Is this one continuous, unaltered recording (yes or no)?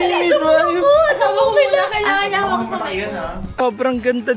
no